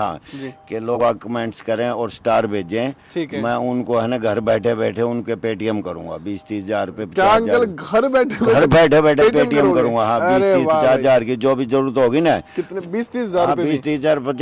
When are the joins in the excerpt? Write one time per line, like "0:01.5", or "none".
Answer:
0:01.0